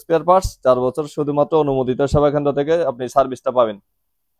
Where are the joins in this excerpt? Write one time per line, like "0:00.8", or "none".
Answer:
none